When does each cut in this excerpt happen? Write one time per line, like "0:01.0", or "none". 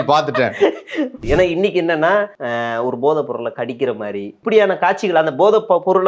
0:01.2
0:02.4
0:04.3